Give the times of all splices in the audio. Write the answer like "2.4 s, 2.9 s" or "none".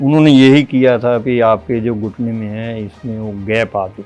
none